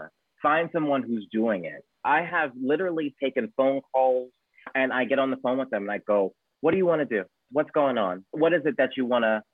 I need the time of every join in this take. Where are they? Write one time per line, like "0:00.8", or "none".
0:02.0
0:04.7

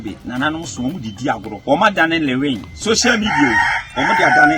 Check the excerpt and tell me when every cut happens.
0:01.5
0:02.7

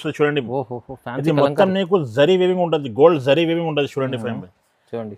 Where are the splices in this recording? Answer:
none

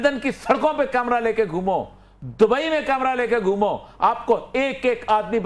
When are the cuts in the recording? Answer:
none

